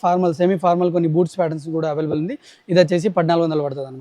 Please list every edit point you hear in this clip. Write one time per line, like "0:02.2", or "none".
none